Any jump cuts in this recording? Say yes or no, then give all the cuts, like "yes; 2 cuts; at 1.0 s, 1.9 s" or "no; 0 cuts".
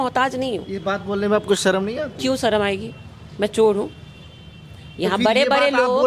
no; 0 cuts